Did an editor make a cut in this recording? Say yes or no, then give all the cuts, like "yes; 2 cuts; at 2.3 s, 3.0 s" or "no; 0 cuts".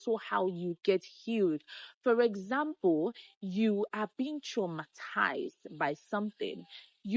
no; 0 cuts